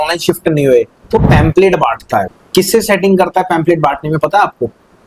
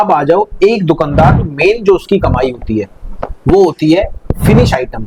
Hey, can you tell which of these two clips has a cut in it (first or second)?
first